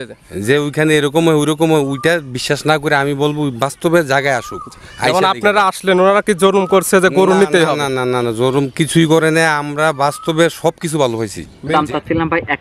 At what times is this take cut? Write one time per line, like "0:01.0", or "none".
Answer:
0:11.7